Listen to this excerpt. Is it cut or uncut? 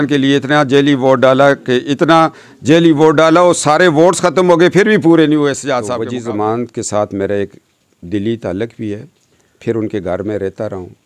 cut